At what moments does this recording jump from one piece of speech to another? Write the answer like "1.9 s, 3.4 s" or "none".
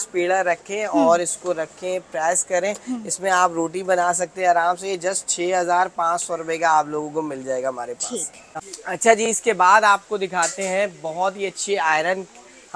none